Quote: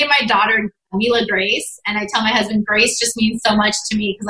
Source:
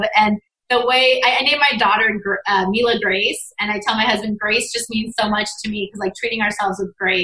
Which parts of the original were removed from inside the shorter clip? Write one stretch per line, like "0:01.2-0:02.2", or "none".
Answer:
0:02.4-0:02.7